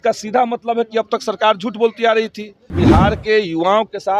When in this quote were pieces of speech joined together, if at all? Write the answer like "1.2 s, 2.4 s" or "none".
2.7 s